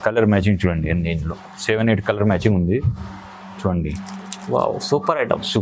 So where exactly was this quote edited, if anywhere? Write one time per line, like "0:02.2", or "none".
0:03.6